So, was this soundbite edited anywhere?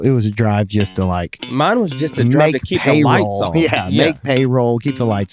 no; 0 cuts

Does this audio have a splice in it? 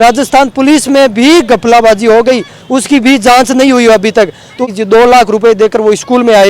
yes; 1 cut; at 4.7 s

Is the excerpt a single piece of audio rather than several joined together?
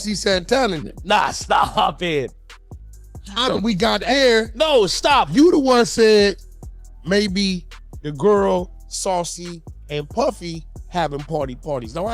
yes; 0 cuts

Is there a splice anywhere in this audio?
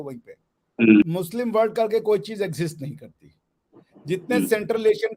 yes; 1 cut; at 1.1 s

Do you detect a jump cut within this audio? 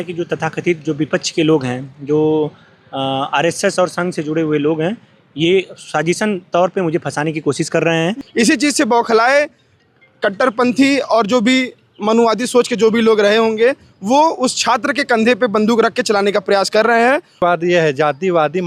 yes; 2 cuts; at 8.2 s, 17.4 s

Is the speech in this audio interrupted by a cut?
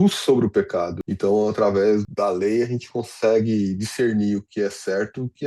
yes; 2 cuts; at 1.0 s, 2.1 s

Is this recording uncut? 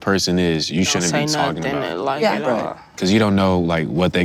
yes; 0 cuts

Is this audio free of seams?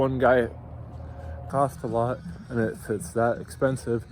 no; 1 cut; at 1.4 s

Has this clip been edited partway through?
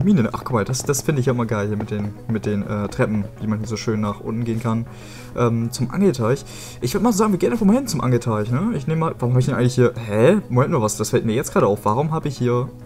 no; 0 cuts

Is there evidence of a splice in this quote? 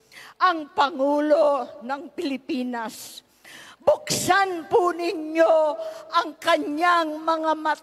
no; 0 cuts

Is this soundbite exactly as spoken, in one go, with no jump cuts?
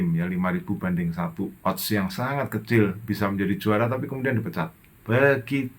no; 2 cuts; at 1.5 s, 4.9 s

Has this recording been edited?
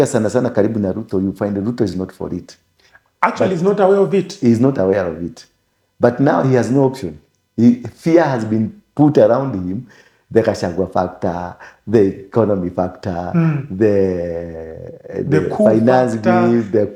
no; 0 cuts

